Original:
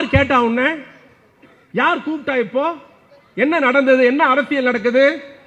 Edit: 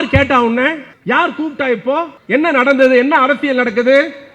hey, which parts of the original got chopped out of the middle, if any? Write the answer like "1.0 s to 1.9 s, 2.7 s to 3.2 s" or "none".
0.9 s to 1.6 s, 2.8 s to 3.2 s